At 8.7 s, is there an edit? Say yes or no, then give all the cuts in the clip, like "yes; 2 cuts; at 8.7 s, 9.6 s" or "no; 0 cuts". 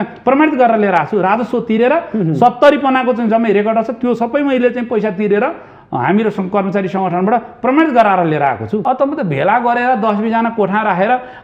yes; 1 cut; at 8.7 s